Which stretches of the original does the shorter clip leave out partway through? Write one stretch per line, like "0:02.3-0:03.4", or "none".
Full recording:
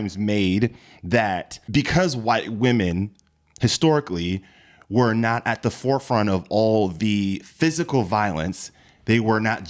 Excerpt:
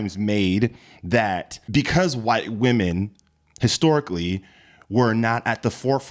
none